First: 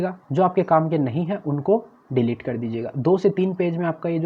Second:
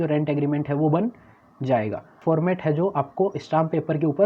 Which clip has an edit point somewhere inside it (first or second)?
second